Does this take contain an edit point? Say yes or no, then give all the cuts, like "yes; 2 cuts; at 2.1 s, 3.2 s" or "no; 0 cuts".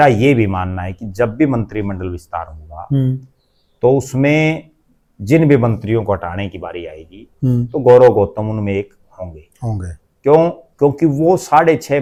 no; 0 cuts